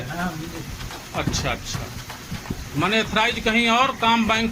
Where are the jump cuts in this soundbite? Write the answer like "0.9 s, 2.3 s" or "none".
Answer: none